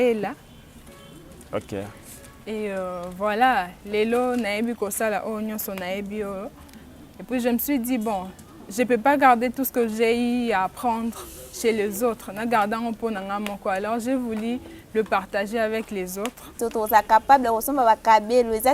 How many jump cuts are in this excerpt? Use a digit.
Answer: 1